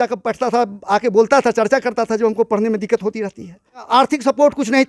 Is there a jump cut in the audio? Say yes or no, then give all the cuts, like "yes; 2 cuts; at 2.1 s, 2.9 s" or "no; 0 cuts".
yes; 1 cut; at 3.9 s